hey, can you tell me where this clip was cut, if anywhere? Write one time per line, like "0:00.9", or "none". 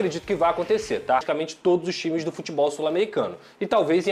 0:01.2